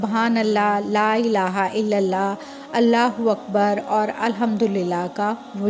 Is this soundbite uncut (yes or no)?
yes